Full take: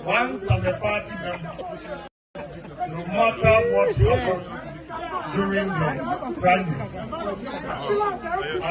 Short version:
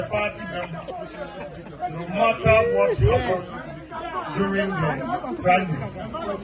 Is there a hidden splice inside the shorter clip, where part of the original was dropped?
yes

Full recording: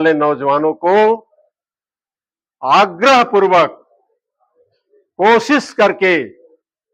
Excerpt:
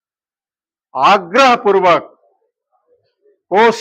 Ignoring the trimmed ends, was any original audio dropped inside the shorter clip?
no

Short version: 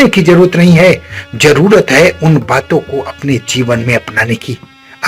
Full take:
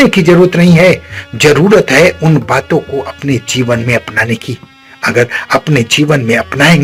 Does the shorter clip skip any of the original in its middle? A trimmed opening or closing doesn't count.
no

